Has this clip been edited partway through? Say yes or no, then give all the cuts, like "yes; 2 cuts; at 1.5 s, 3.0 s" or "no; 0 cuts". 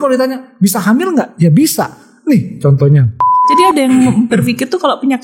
yes; 1 cut; at 3.4 s